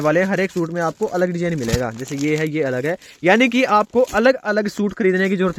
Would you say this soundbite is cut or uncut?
uncut